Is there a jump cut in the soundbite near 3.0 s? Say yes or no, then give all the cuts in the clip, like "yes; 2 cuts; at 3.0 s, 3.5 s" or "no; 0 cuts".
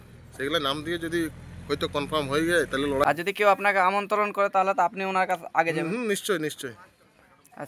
yes; 1 cut; at 3.0 s